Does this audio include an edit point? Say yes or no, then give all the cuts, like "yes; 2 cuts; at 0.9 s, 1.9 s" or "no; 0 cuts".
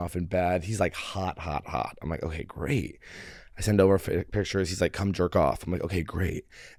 no; 0 cuts